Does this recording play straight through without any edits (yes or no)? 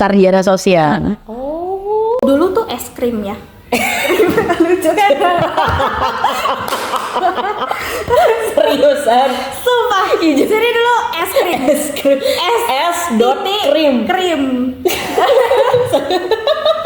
yes